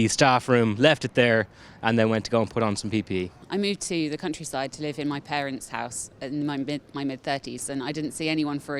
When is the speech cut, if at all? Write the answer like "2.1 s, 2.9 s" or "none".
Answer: 3.4 s, 7.6 s

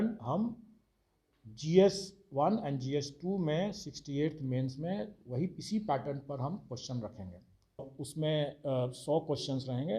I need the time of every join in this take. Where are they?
8.0 s

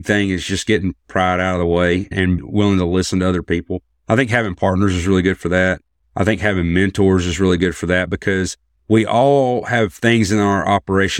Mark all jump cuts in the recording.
2.4 s

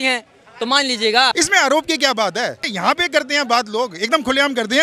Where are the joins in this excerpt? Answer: 1.3 s, 2.7 s

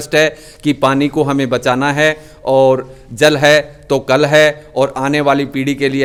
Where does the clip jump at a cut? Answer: none

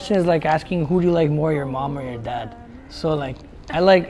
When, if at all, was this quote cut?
none

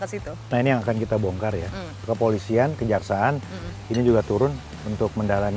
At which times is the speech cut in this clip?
none

